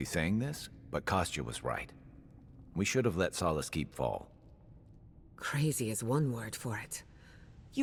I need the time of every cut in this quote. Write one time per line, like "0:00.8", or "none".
none